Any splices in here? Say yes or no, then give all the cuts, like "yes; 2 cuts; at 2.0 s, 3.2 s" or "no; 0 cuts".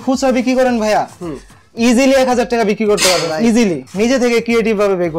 yes; 1 cut; at 3.8 s